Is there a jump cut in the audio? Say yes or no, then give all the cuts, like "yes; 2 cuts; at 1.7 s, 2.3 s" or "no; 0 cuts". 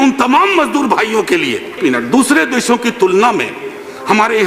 yes; 1 cut; at 1.8 s